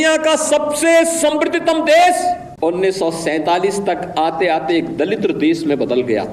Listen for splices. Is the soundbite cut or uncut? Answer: cut